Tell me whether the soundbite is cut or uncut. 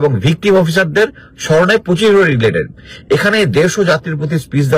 uncut